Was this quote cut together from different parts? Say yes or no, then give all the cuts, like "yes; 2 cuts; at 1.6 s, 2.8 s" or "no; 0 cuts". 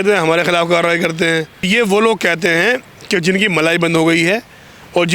yes; 1 cut; at 1.7 s